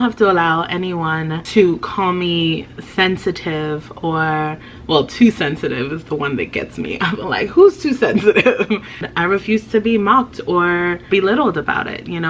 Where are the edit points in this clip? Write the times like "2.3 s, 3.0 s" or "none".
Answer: 1.4 s, 9.1 s, 11.0 s